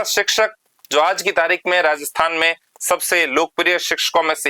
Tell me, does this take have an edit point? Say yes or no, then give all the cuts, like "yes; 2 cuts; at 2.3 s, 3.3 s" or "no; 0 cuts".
no; 0 cuts